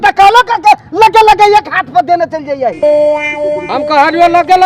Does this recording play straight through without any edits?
no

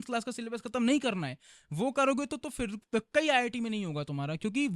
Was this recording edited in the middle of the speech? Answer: no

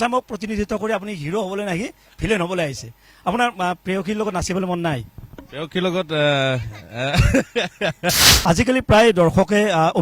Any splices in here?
yes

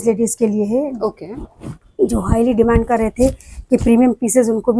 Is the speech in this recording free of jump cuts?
yes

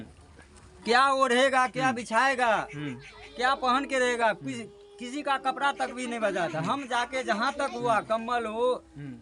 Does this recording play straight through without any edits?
yes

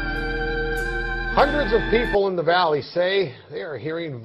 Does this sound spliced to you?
yes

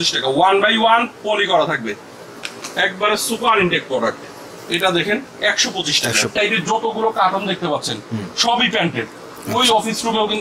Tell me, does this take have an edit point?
yes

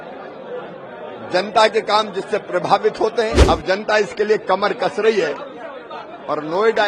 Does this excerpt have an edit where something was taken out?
yes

